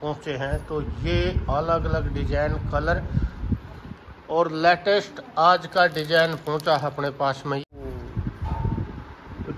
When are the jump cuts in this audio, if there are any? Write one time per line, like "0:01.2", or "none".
0:07.6